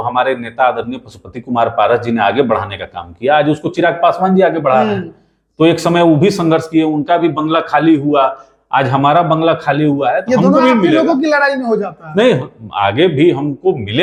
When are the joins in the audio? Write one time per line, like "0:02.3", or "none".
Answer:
none